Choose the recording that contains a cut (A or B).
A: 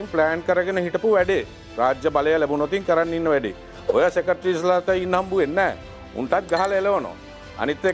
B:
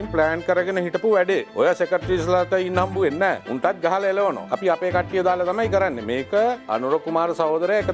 B